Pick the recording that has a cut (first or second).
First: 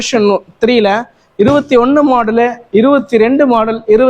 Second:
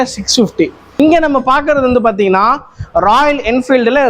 second